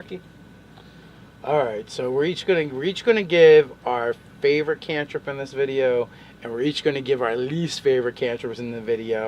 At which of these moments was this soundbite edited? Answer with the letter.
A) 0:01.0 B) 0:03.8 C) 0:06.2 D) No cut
A